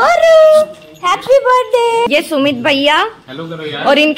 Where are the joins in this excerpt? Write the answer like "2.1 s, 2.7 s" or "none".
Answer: 2.1 s